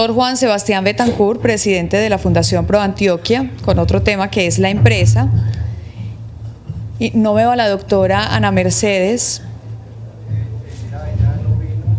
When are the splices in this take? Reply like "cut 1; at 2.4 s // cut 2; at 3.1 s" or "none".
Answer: cut 1; at 10.8 s

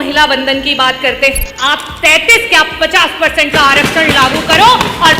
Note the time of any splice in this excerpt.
cut 1; at 1.5 s

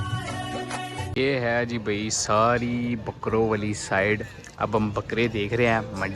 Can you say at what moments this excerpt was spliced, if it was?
cut 1; at 1.1 s

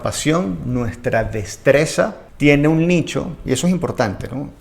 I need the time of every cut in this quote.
cut 1; at 2.2 s

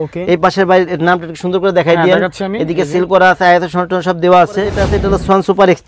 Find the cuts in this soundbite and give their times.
cut 1; at 4.9 s

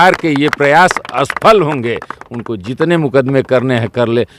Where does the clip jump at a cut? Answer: none

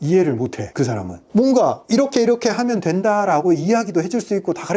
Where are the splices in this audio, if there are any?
cut 1; at 1.2 s

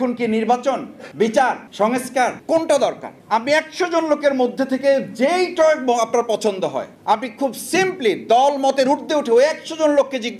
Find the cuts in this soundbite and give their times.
cut 1; at 1.0 s // cut 2; at 2.0 s // cut 3; at 3.1 s // cut 4; at 6.9 s

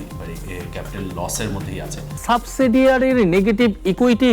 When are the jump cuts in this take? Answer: cut 1; at 2.2 s

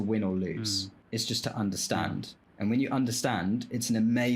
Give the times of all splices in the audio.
cut 1; at 0.9 s // cut 2; at 2.4 s

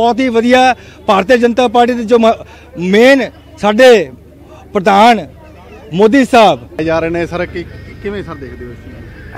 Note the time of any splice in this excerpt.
cut 1; at 6.7 s

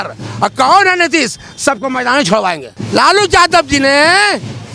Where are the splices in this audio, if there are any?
cut 1; at 2.7 s

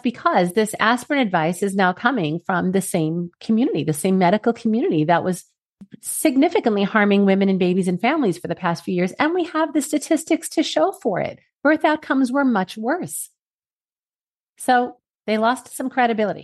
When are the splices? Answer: cut 1; at 15.1 s

